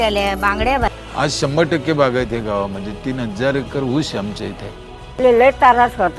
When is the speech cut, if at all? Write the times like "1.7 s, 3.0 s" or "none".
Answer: 1.0 s, 5.2 s